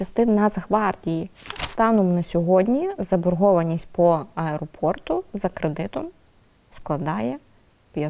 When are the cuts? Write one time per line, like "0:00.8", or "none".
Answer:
0:01.3